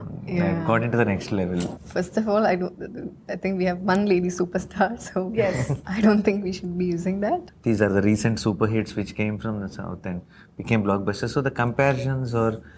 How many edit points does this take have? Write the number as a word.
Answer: two